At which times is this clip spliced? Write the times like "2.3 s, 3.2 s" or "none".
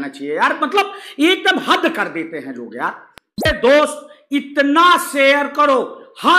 3.5 s